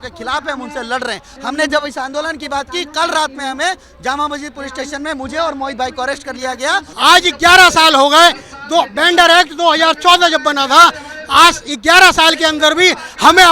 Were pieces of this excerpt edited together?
yes; 2 cuts; at 1.3 s, 6.9 s

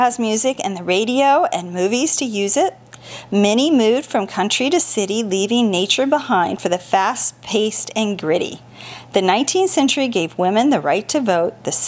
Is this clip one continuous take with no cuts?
yes; 0 cuts

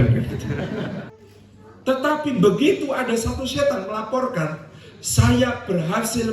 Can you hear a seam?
yes; 1 cut; at 1.1 s

